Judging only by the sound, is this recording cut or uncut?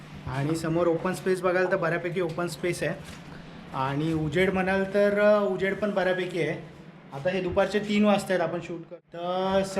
cut